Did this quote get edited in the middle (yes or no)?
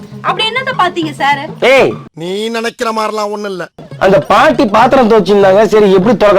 yes